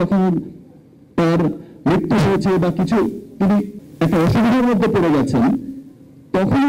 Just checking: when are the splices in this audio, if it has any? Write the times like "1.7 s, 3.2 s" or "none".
3.8 s